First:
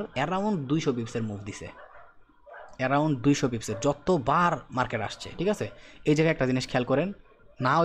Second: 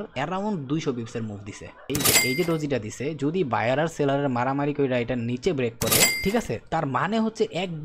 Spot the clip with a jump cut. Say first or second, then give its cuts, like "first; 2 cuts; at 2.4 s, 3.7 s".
second; 2 cuts; at 1.9 s, 6.1 s